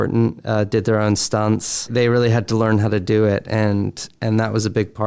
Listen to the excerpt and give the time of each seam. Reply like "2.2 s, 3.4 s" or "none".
1.9 s